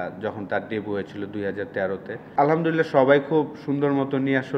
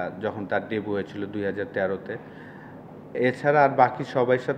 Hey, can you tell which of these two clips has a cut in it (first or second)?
first